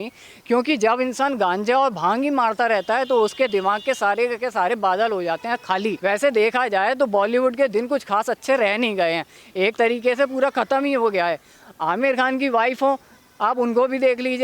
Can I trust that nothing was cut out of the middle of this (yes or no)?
no